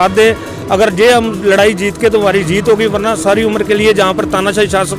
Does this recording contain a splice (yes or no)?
no